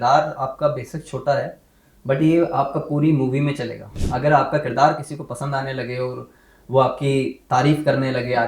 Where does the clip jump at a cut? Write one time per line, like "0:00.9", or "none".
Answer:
0:04.0